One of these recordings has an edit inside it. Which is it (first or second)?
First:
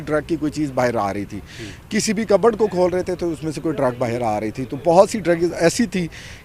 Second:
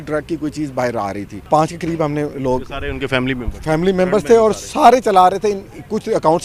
second